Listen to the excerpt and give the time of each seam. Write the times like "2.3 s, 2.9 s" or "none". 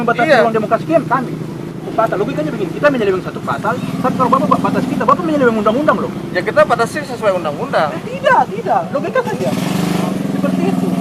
1.9 s